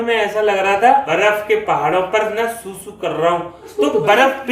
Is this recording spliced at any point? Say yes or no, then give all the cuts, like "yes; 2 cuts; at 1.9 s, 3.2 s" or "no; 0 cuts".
yes; 2 cuts; at 1.1 s, 3.8 s